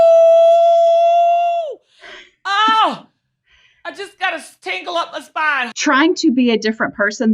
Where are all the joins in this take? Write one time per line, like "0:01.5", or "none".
0:05.7